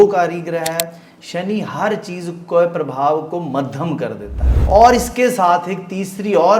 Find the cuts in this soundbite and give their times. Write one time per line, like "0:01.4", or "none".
0:04.6